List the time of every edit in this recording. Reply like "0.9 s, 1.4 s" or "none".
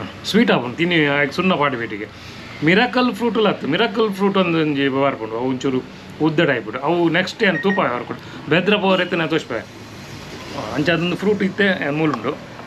none